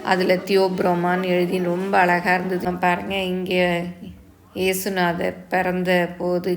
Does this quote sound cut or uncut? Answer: cut